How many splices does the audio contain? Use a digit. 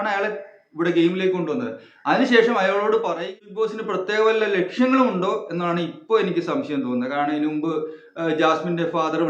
1